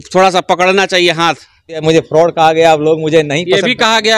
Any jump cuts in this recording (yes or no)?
yes